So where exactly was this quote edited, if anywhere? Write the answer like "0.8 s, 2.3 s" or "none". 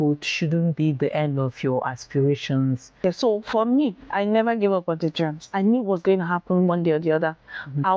3.0 s